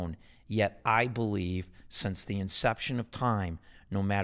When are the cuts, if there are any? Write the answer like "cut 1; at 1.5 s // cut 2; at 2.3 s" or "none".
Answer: none